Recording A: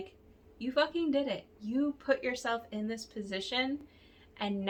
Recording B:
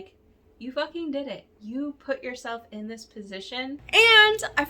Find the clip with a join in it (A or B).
B